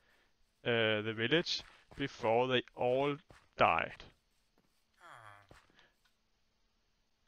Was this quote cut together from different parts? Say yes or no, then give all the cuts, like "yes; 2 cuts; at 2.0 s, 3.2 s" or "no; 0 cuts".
yes; 1 cut; at 4.0 s